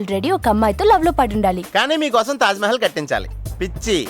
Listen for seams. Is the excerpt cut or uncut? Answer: uncut